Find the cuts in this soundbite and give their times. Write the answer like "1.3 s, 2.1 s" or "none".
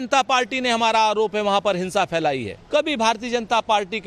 2.6 s

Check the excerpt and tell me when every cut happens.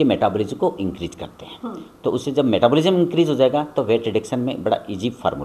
none

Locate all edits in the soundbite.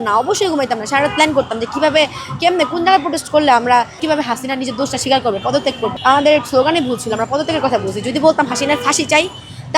4.0 s, 6.0 s

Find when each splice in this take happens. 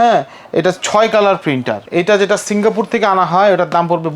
1.8 s

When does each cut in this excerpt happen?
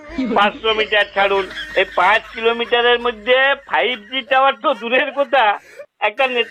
none

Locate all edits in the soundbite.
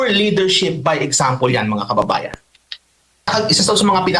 3.3 s

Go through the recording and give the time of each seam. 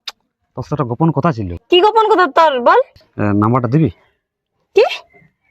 1.5 s, 3.0 s

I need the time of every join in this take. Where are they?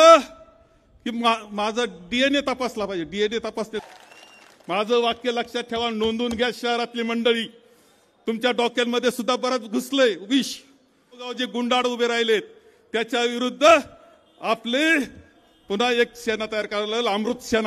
3.8 s, 11.4 s

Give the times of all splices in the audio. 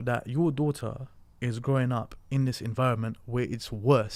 none

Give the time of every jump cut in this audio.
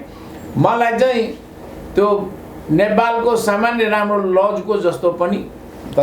none

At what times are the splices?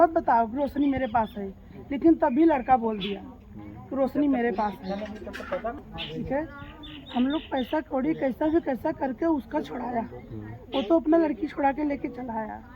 5.9 s

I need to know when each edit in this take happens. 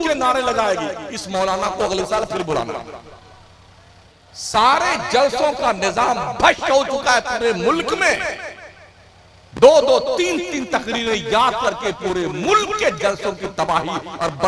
4.1 s

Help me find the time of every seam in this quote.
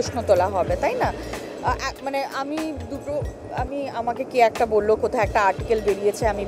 none

